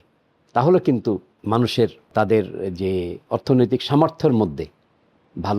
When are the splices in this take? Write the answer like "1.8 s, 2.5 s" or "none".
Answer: 1.3 s, 2.1 s, 3.2 s